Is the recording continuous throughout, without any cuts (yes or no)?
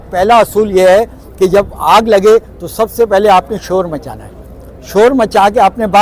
yes